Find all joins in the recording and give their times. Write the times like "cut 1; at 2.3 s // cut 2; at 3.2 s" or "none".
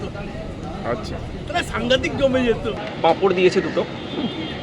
cut 1; at 2.8 s